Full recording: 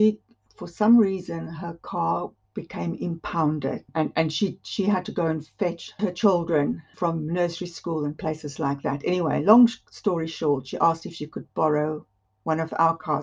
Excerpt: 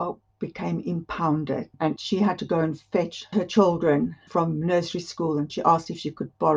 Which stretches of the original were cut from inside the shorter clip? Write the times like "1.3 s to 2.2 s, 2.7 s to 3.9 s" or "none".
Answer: 4.1 s to 4.6 s, 8.2 s to 10.7 s